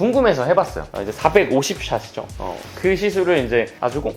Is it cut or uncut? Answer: cut